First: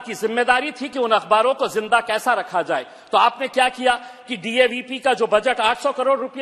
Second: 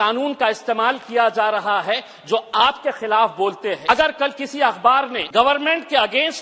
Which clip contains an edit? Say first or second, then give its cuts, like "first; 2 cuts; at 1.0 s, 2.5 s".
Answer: second; 2 cuts; at 3.8 s, 5.2 s